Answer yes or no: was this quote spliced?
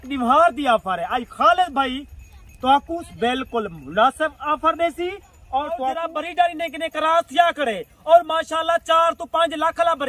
yes